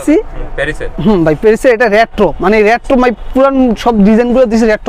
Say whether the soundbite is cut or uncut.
uncut